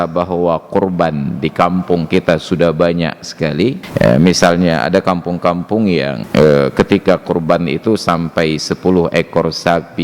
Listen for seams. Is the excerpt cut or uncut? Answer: cut